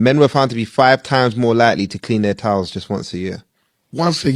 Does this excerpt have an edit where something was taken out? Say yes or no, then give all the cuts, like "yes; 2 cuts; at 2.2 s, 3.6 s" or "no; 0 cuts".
no; 0 cuts